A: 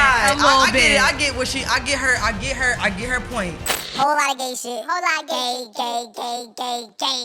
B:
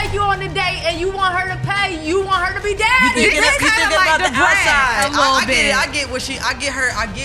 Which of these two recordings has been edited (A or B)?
A